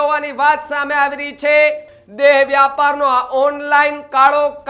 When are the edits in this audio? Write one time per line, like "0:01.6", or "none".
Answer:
0:01.9

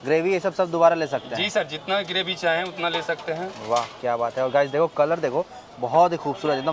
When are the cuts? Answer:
none

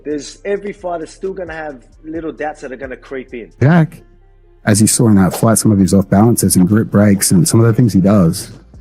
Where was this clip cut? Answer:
0:03.5

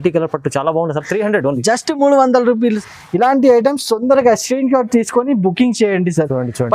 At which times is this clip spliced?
0:02.8

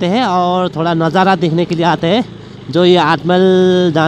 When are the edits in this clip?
none

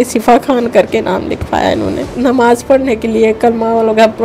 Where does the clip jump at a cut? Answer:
0:02.1

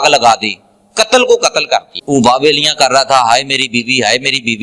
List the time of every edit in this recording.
0:01.9

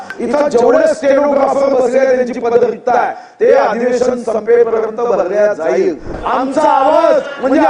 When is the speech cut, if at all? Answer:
0:06.2

